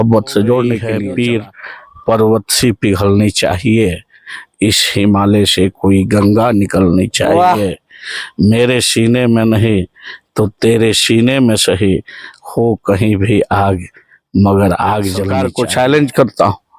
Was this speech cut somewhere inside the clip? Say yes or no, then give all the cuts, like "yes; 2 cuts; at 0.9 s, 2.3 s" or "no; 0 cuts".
yes; 2 cuts; at 0.8 s, 15.5 s